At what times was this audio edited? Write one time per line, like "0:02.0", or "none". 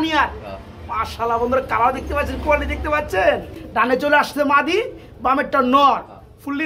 0:03.9